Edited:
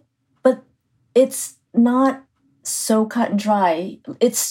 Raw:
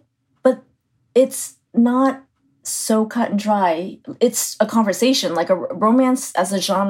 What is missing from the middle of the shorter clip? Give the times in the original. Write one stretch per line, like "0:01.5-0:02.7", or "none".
none